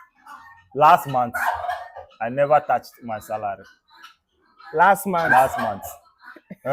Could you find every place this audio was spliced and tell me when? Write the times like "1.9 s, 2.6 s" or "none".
none

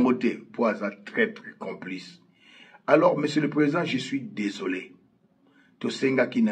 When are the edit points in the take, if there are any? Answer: none

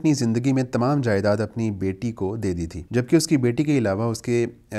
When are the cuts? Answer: 2.8 s

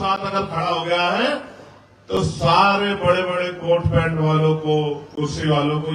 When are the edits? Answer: none

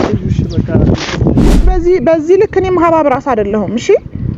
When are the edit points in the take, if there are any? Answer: 1.7 s

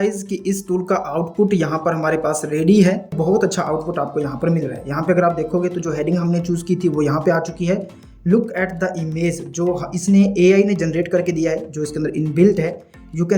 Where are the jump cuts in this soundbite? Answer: 3.1 s

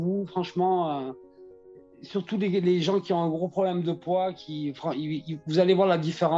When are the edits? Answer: none

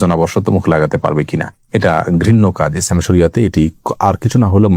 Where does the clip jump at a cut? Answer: none

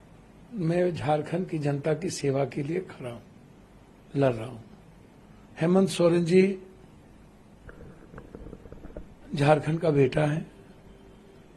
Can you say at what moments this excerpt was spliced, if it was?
none

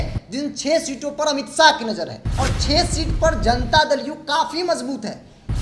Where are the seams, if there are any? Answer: 2.2 s

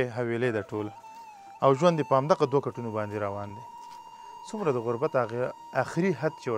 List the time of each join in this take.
none

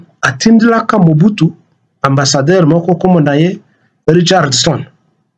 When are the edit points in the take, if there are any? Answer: none

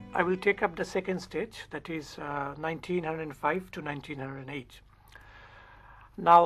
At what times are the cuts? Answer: none

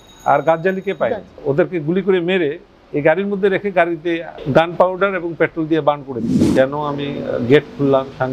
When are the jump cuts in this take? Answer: 1.3 s, 4.3 s, 6.3 s

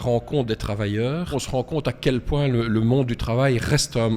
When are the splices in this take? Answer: 1.3 s

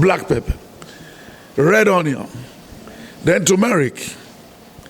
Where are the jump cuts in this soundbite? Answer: none

